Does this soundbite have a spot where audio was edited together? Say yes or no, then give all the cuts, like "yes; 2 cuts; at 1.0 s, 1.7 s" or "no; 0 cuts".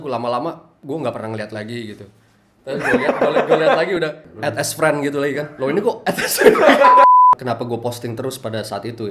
yes; 3 cuts; at 4.3 s, 6.8 s, 7.4 s